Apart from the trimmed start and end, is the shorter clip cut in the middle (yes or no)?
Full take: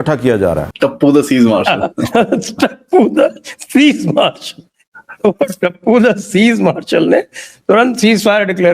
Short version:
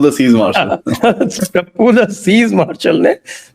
yes